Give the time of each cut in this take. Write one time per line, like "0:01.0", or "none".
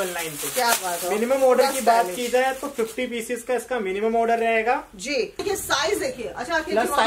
0:05.4